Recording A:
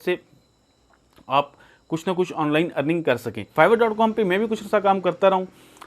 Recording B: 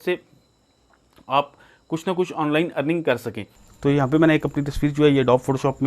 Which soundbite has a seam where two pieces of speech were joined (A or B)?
B